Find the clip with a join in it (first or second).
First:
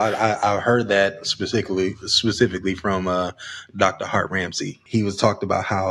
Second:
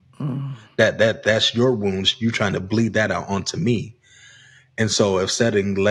first